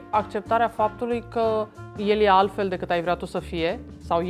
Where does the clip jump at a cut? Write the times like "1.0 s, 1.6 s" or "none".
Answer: 1.8 s